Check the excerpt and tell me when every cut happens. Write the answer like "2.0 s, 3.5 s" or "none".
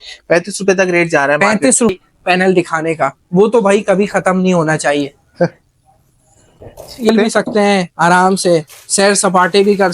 1.9 s, 7.1 s